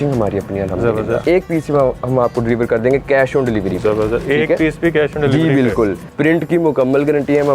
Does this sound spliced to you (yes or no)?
yes